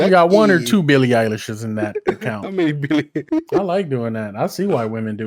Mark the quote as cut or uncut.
cut